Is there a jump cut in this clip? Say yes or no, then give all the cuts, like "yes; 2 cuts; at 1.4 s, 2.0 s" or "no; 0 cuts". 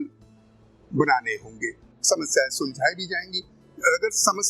yes; 1 cut; at 1.9 s